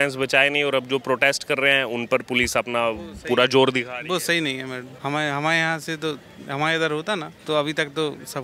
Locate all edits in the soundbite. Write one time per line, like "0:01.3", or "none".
0:04.9
0:07.3